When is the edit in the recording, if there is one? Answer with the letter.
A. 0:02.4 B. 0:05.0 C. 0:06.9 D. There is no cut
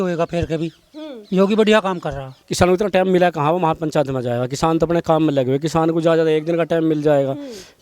A